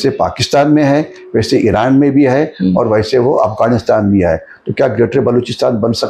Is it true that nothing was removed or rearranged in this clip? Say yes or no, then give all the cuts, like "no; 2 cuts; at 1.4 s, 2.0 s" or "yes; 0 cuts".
yes; 0 cuts